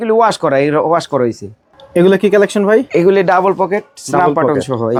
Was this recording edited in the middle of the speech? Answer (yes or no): no